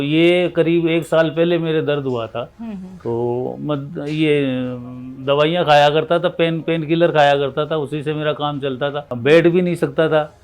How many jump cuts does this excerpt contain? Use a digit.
0